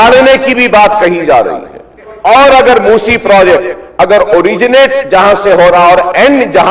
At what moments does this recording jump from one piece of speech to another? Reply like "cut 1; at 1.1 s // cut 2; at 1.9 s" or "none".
cut 1; at 2.1 s